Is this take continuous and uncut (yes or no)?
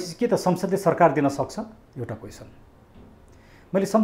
yes